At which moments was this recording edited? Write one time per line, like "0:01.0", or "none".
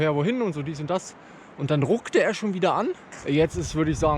0:03.1